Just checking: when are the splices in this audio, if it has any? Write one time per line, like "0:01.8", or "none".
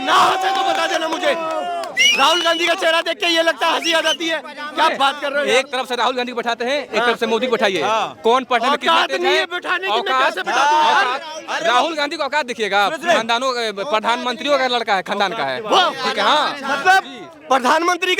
none